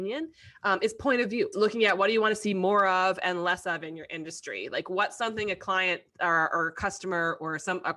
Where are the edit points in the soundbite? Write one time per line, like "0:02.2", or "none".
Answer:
0:01.5